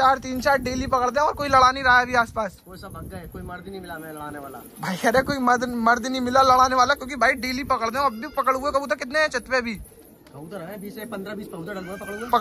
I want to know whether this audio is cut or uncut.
uncut